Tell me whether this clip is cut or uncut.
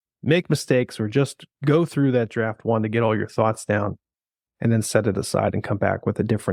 uncut